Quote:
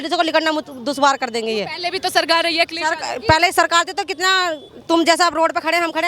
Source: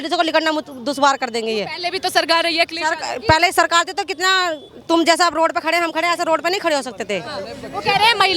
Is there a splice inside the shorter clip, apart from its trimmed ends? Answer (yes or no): no